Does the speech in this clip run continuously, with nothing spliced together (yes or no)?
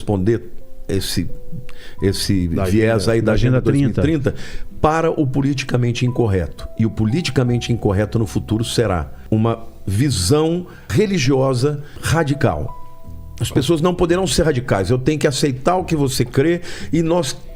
no